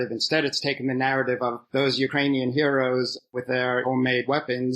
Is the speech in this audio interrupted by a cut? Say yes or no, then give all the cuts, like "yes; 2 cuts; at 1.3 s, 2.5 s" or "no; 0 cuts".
no; 0 cuts